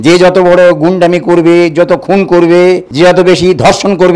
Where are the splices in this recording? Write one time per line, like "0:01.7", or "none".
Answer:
0:02.9